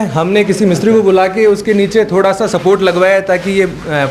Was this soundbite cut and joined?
no; 0 cuts

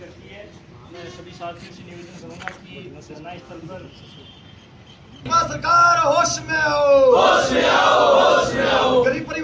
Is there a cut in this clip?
yes; 1 cut; at 5.3 s

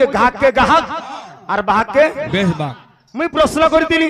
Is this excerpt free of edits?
yes; 0 cuts

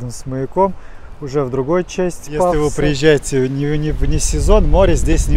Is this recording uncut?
no; 1 cut; at 2.5 s

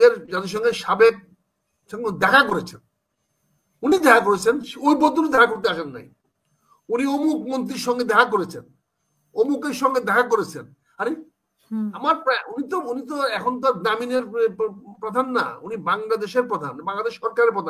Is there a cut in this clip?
no; 0 cuts

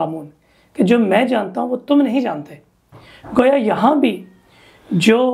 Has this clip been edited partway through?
no; 0 cuts

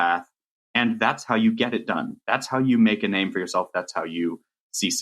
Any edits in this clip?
no; 0 cuts

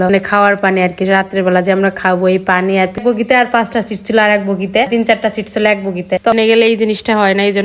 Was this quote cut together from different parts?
yes; 2 cuts; at 3.0 s, 6.4 s

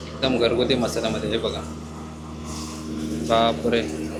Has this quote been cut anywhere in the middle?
no; 0 cuts

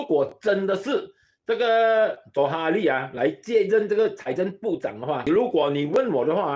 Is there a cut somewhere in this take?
yes; 1 cut; at 5.2 s

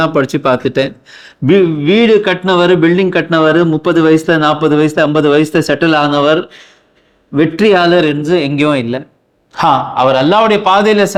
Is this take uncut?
yes; 0 cuts

